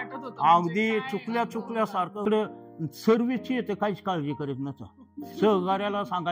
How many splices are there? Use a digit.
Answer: 1